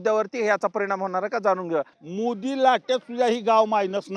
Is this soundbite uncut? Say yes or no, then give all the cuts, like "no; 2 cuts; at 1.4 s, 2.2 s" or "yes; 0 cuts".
no; 1 cut; at 2.0 s